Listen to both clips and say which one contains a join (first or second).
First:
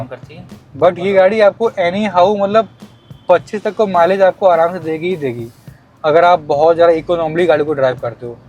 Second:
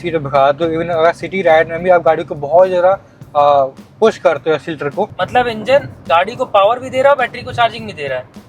second